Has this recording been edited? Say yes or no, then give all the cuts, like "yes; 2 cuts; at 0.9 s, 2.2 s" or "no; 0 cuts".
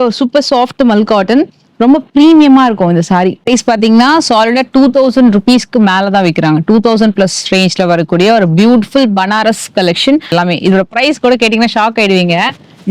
yes; 2 cuts; at 3.4 s, 10.3 s